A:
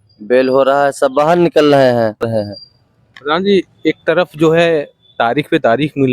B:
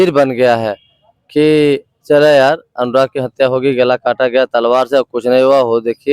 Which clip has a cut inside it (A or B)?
A